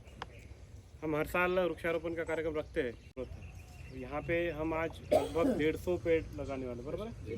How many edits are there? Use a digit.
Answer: 1